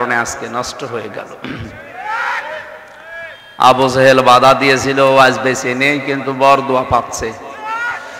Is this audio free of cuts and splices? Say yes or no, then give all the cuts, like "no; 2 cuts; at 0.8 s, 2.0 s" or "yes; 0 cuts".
yes; 0 cuts